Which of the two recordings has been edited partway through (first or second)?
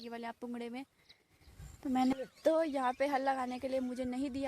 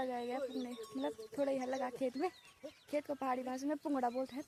first